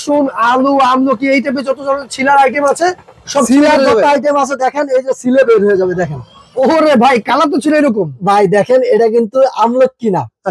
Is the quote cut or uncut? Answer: uncut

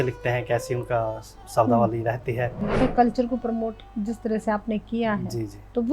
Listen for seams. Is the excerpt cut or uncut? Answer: cut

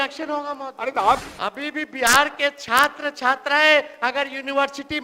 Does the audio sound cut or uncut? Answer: cut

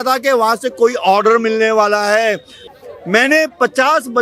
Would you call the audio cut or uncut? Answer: cut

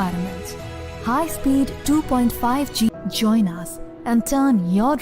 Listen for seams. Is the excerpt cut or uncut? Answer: cut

